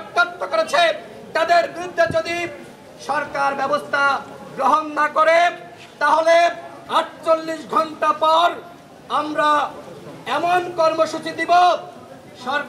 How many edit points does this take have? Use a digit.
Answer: 0